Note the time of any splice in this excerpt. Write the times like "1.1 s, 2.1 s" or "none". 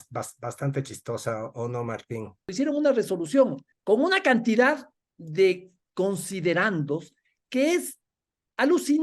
2.5 s, 3.7 s, 5.8 s